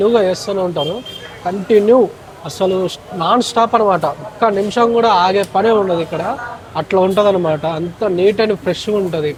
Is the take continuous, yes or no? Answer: yes